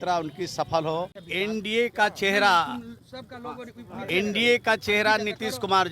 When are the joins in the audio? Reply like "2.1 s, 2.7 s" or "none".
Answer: 1.2 s